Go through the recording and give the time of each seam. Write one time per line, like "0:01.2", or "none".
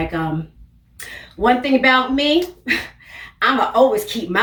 none